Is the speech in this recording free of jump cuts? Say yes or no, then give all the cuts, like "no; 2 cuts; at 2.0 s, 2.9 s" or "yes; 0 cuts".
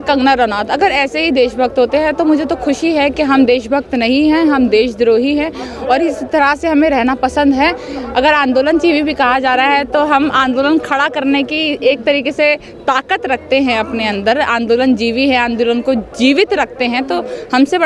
yes; 0 cuts